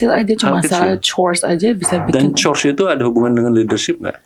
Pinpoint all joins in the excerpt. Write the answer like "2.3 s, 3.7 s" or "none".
none